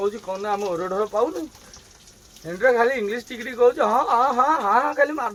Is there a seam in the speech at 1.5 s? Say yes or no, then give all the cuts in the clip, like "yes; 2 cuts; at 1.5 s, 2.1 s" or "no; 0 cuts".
no; 0 cuts